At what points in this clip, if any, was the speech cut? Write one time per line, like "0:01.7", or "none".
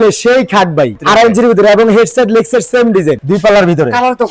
0:01.0
0:03.2